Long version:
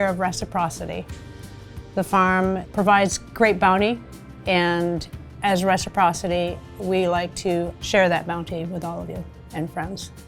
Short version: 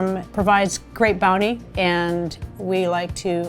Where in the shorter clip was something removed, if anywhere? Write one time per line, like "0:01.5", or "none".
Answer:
0:01.7
0:02.5

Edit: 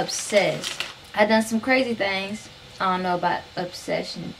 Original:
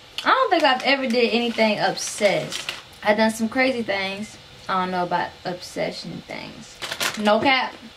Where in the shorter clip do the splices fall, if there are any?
none

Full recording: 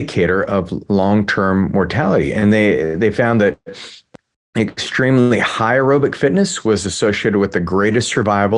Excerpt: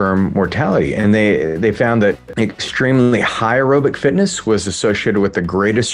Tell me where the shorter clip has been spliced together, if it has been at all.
0:02.3

